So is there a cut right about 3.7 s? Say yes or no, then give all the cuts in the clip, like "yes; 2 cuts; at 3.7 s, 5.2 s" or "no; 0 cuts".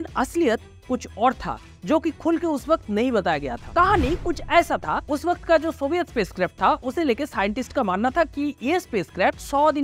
no; 0 cuts